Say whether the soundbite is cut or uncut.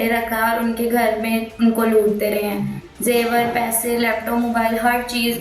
uncut